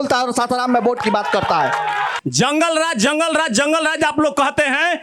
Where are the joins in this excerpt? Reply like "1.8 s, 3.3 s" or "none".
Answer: 2.1 s